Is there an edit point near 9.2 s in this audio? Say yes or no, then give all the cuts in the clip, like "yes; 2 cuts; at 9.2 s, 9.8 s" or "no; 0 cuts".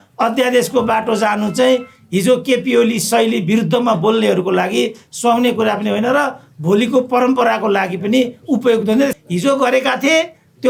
yes; 1 cut; at 9.2 s